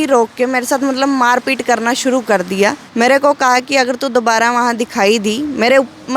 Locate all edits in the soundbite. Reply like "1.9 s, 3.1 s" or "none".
2.8 s